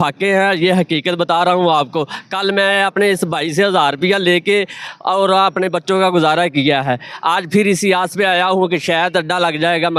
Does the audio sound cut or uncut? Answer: uncut